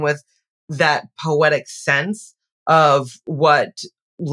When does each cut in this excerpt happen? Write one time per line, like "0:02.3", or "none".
none